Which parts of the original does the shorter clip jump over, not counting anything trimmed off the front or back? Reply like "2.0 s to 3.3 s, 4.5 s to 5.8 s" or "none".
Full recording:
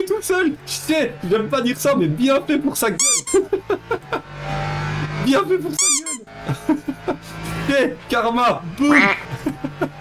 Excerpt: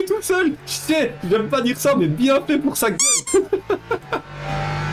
none